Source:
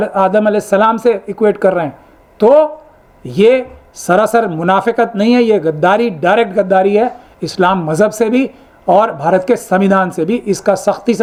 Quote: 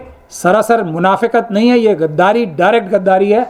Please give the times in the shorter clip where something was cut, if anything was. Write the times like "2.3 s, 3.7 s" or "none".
none